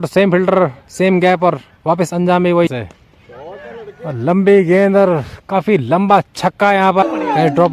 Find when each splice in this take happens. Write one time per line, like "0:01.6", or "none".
0:02.7
0:07.0